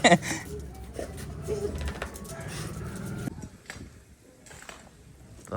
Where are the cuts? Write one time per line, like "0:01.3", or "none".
0:03.3